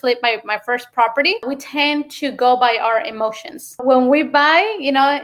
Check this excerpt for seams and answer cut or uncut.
cut